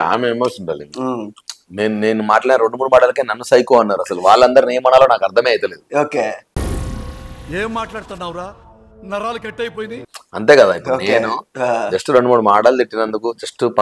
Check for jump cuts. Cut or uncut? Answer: cut